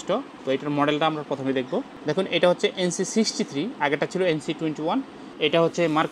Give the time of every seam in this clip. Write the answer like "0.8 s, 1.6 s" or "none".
1.9 s, 5.3 s